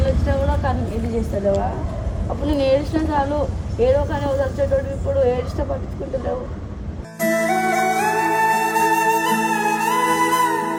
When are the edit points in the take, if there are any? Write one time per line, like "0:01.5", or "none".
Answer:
none